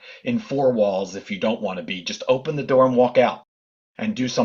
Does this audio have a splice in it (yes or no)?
no